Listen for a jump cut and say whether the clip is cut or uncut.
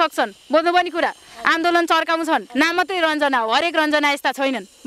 cut